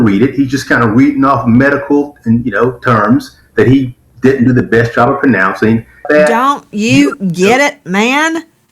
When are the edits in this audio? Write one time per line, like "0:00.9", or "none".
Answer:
0:06.0